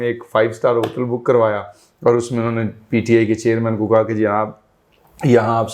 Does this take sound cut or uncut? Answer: uncut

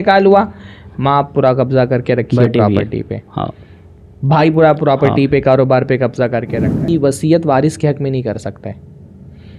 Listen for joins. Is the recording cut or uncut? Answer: cut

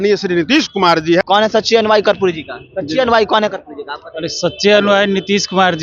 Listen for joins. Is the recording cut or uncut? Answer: cut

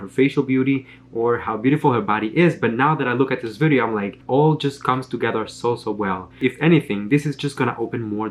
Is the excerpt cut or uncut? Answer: cut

